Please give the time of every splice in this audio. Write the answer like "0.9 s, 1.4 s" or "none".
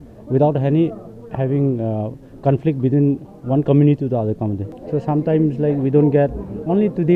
4.7 s